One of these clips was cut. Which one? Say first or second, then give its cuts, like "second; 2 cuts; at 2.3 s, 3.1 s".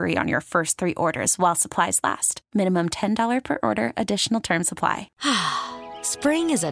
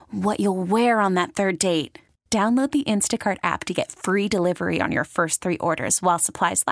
first; 1 cut; at 5.1 s